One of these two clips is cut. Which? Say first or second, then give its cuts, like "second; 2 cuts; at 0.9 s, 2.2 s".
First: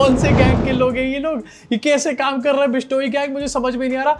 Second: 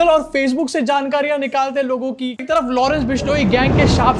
second; 1 cut; at 2.4 s